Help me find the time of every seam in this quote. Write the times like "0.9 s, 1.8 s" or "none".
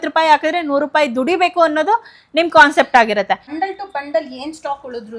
3.6 s